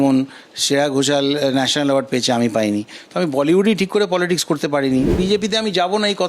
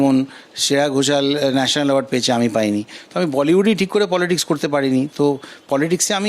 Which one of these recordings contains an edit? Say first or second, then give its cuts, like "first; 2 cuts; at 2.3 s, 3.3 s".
first; 1 cut; at 5.1 s